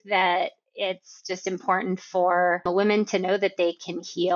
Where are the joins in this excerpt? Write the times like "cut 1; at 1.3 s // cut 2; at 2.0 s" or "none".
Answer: cut 1; at 2.6 s